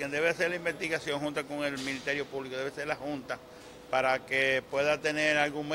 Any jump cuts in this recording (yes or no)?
no